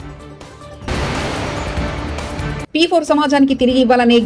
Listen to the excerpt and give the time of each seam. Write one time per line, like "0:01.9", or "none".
0:00.9
0:02.6